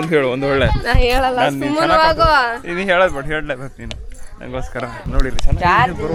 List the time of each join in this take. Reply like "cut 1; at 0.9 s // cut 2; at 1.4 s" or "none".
none